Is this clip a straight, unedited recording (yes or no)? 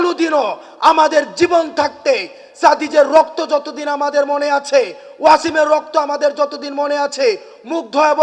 yes